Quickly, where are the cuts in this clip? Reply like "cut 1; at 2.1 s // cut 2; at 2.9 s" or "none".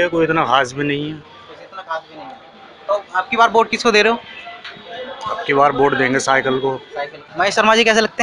cut 1; at 7.2 s